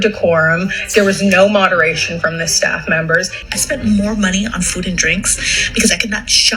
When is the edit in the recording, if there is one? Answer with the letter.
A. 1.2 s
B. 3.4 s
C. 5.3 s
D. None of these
B